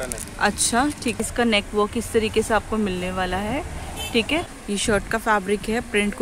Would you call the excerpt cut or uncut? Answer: cut